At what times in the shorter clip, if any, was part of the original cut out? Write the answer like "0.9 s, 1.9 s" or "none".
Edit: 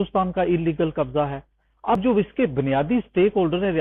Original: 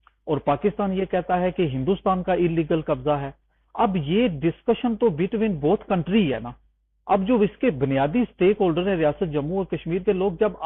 2.0 s